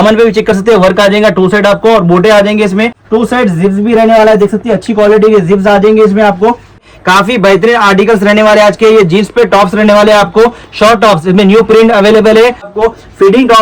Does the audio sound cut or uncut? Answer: cut